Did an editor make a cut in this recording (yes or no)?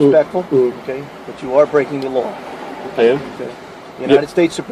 no